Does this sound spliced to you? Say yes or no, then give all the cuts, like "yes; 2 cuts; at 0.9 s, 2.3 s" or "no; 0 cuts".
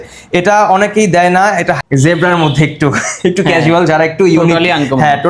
yes; 1 cut; at 1.8 s